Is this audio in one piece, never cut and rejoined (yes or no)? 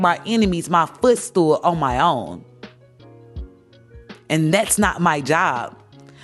yes